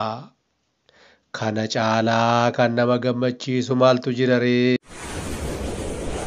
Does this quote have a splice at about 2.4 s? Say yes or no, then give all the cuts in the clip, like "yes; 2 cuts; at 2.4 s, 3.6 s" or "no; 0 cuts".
no; 1 cut; at 4.8 s